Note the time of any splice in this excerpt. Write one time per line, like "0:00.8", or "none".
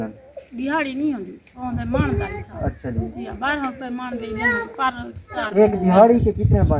0:05.4